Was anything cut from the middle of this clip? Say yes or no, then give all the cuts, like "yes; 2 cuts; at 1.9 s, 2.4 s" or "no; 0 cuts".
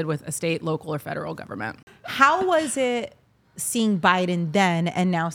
yes; 1 cut; at 2.0 s